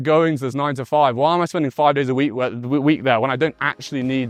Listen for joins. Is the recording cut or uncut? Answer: uncut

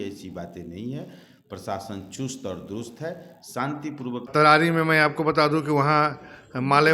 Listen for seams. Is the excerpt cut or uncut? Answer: cut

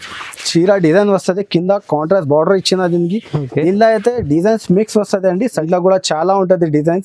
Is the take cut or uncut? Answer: cut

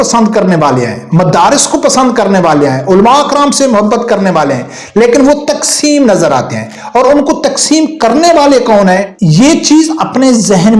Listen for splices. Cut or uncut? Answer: cut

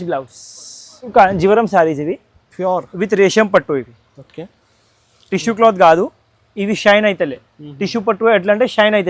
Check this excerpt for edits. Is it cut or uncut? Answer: cut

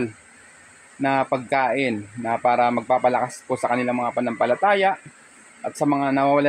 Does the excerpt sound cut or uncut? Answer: uncut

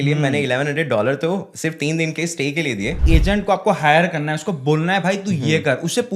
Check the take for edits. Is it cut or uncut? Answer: cut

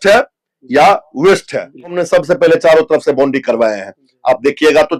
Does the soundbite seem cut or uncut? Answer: cut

